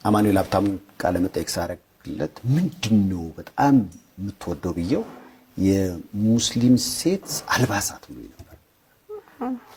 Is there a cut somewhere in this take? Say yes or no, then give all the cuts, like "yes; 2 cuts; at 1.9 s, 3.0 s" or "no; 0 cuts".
no; 0 cuts